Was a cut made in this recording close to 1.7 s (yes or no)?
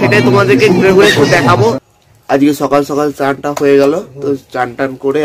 yes